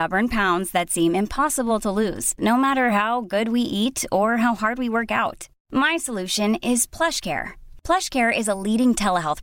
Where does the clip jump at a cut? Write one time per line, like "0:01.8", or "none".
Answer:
none

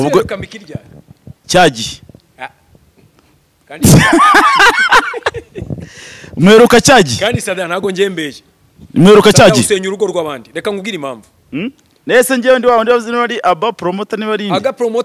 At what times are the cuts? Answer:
none

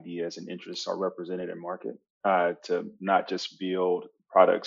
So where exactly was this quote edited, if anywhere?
none

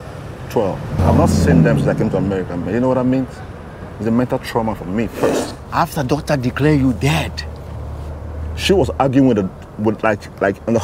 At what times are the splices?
0:01.0
0:05.4

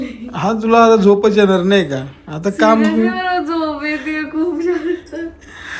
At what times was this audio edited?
none

